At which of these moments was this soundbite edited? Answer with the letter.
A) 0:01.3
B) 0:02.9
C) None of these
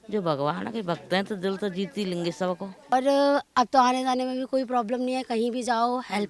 B